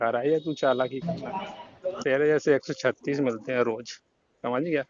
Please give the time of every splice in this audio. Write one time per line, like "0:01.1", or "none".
0:02.0